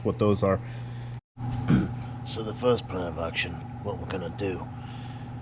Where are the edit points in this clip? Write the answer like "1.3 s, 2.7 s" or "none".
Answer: 1.2 s